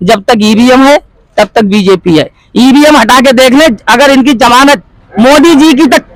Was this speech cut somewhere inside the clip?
no; 0 cuts

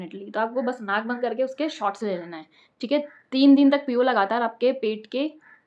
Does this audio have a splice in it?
no; 0 cuts

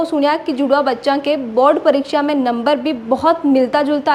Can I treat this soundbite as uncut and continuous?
yes; 0 cuts

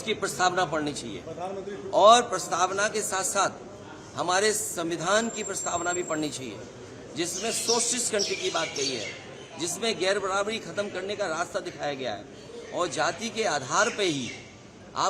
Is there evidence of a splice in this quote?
no; 0 cuts

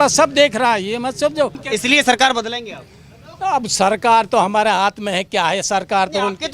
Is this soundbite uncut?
no; 1 cut; at 1.6 s

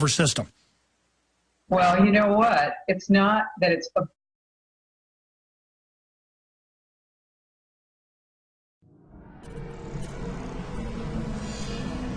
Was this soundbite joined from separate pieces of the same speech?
no; 0 cuts

